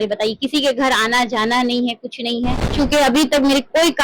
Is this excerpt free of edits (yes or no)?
no